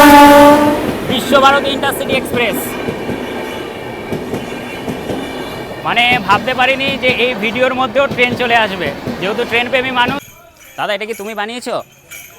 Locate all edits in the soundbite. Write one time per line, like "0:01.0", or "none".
0:10.2